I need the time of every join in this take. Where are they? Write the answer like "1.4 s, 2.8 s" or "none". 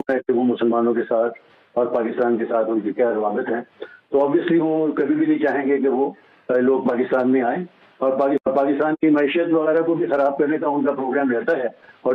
none